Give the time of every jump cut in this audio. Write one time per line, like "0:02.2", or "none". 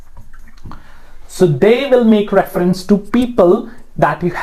none